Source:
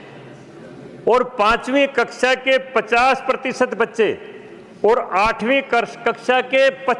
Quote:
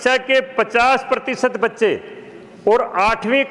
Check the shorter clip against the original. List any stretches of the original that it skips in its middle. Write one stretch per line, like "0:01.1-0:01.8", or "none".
none